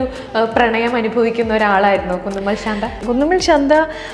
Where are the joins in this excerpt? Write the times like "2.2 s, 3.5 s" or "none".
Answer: 3.0 s